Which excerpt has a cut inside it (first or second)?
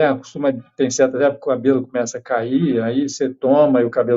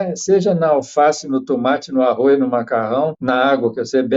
second